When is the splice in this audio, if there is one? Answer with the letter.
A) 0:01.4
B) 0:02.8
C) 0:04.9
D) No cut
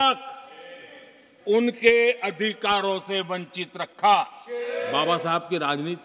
C